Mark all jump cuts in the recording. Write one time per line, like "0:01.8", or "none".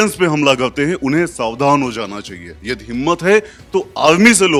none